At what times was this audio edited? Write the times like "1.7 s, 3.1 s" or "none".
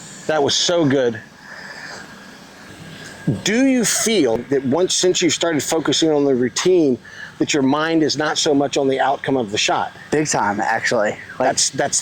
2.7 s, 4.4 s